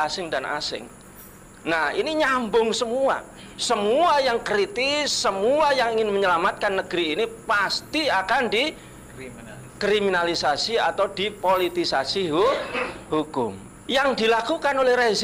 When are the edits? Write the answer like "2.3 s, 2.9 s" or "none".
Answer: none